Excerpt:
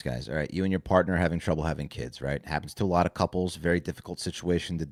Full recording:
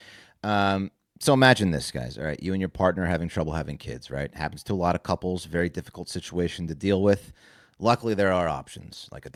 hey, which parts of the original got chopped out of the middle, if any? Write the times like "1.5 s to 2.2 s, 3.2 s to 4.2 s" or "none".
none